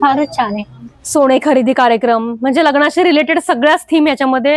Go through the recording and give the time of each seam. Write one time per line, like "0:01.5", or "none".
none